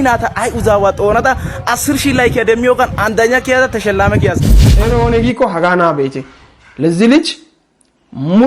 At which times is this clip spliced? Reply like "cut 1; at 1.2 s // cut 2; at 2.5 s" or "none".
cut 1; at 4.6 s